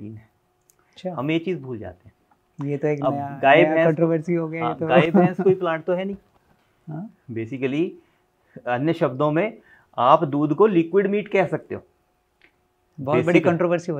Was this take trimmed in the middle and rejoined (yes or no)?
no